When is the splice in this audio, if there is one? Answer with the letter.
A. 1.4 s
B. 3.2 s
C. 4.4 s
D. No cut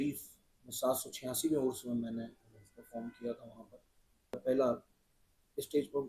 C